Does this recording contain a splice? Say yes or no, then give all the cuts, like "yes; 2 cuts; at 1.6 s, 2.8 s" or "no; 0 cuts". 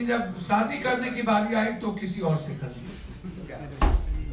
yes; 1 cut; at 3.4 s